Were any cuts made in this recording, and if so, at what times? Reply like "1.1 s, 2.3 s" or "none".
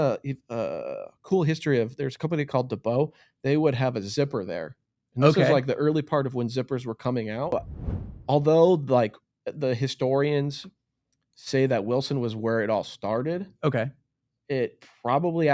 7.5 s